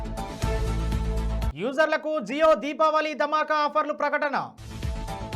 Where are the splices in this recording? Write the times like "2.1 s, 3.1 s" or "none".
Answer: 1.5 s